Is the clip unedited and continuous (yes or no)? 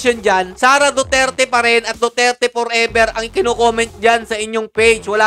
yes